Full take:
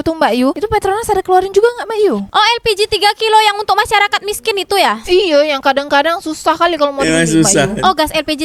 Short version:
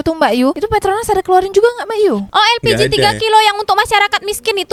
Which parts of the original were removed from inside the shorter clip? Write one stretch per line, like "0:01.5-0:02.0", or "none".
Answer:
none